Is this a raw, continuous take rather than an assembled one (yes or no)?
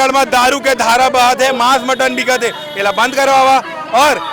yes